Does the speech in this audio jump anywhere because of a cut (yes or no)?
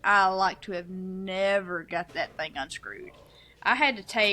no